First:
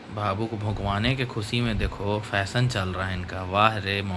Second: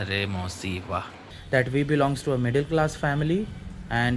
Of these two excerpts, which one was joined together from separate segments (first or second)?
second